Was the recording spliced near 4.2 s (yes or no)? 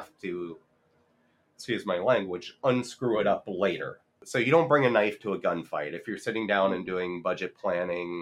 yes